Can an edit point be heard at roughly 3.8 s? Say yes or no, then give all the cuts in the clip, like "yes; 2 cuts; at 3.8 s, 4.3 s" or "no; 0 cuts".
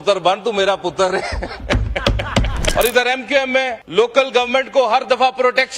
yes; 2 cuts; at 2.7 s, 3.8 s